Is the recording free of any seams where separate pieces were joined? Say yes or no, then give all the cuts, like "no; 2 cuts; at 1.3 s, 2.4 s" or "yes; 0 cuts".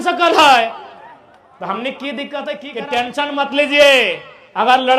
no; 1 cut; at 2.7 s